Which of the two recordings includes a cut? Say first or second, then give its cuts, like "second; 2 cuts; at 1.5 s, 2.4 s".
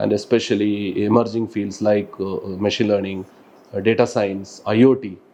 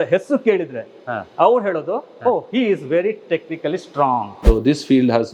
second; 1 cut; at 4.4 s